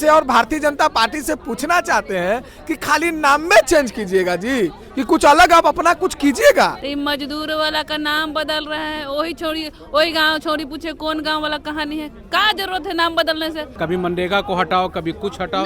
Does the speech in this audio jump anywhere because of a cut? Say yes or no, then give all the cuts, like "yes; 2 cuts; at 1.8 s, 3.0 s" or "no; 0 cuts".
yes; 2 cuts; at 6.8 s, 13.7 s